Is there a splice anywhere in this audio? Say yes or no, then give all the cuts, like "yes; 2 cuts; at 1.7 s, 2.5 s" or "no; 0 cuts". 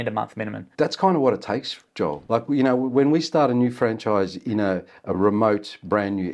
no; 0 cuts